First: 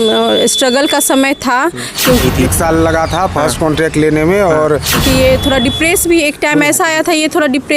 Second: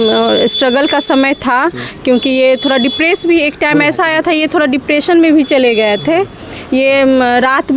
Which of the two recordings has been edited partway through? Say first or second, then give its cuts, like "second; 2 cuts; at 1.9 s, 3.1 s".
first; 2 cuts; at 2.2 s, 5.0 s